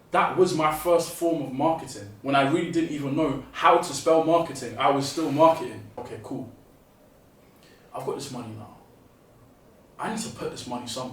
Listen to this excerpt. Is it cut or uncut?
cut